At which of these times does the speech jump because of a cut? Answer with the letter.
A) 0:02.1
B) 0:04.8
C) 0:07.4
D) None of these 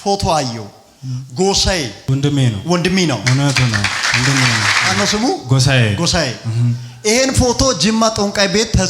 B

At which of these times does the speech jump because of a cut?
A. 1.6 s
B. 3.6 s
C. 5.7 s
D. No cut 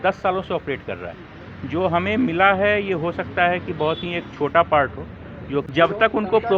C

